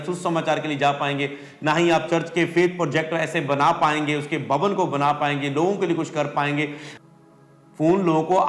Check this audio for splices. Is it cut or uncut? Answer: cut